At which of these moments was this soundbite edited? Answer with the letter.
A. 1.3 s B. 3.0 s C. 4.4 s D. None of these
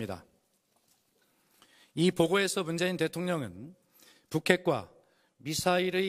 D